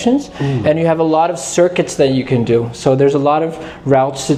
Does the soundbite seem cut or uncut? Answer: uncut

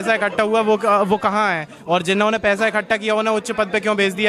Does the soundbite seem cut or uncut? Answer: uncut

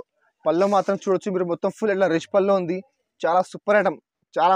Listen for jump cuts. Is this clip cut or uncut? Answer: uncut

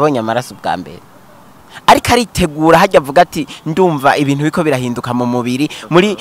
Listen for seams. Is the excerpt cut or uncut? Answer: uncut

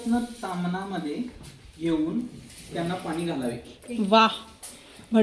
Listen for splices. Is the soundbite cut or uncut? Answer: uncut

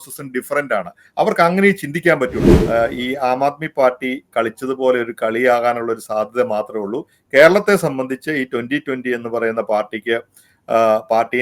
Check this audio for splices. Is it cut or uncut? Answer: cut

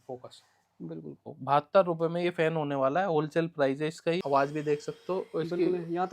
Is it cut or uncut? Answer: cut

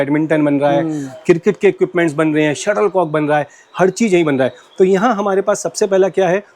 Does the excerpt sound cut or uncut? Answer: uncut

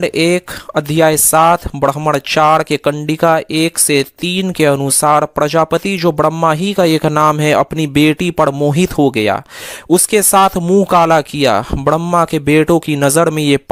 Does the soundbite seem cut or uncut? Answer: uncut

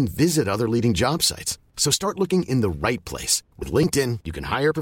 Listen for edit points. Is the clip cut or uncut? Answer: uncut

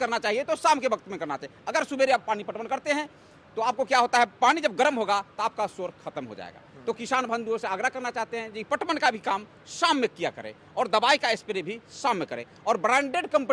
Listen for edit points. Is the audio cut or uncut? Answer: uncut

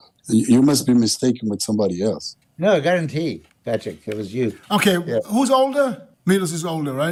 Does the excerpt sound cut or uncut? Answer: uncut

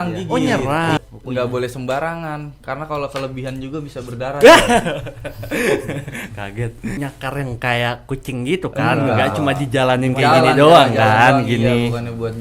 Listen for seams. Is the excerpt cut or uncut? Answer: cut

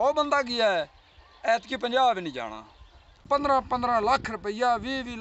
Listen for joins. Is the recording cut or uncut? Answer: cut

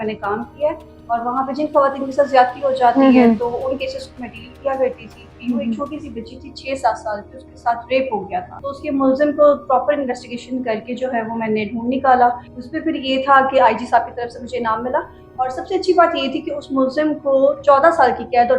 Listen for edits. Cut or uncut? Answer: cut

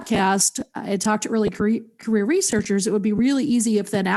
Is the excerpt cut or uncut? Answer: uncut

